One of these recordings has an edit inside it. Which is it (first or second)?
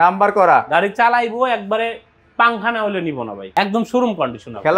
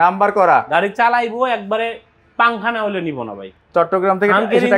first